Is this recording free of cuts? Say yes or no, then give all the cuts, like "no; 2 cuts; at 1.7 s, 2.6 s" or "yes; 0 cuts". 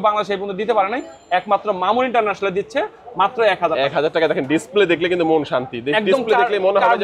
yes; 0 cuts